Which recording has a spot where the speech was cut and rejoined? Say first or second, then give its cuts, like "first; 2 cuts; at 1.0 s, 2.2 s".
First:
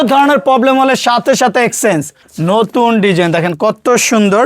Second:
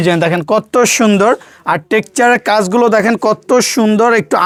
first; 1 cut; at 2.2 s